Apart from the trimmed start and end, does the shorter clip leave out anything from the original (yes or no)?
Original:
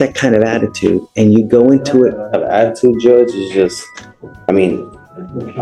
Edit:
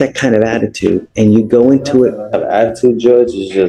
no